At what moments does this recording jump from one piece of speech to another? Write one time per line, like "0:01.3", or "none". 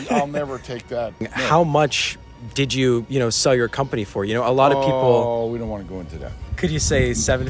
0:01.3
0:06.5